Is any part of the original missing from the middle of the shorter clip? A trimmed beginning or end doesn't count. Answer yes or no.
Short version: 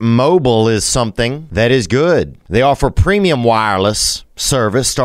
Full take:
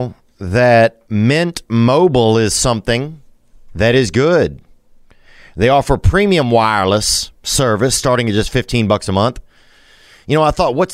yes